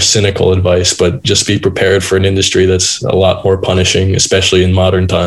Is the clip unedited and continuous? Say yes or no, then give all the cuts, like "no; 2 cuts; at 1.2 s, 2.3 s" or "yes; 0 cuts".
yes; 0 cuts